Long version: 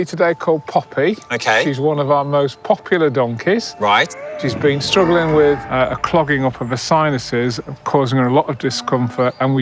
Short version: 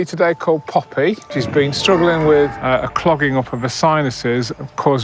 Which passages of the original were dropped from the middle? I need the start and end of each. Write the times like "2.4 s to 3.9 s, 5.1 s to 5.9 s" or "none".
1.2 s to 4.3 s